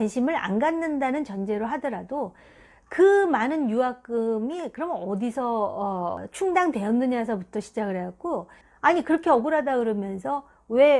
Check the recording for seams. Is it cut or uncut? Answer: cut